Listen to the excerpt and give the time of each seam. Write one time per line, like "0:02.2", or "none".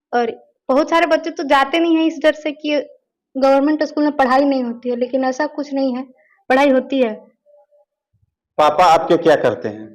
none